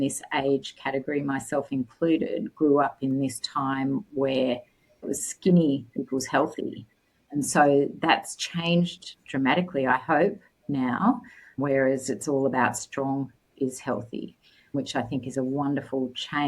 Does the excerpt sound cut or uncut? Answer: cut